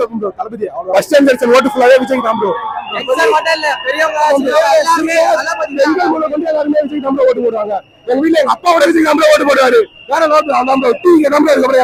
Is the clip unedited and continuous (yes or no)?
yes